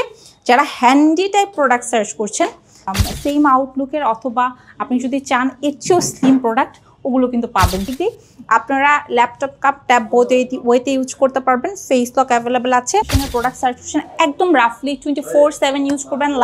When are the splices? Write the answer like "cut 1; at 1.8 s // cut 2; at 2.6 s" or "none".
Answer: cut 1; at 2.9 s // cut 2; at 7.9 s // cut 3; at 13.2 s